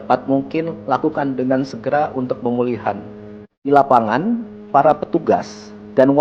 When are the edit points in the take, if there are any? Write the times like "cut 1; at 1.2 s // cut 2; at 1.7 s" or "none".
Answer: cut 1; at 3.6 s